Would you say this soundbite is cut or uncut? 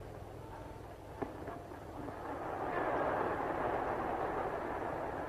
cut